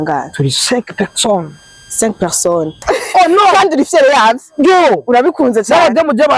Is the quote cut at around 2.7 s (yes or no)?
yes